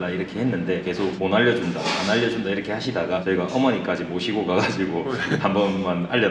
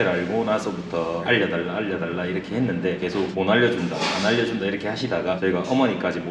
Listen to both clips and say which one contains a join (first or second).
second